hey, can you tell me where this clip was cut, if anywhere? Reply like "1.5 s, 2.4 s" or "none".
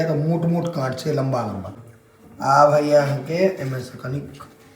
1.8 s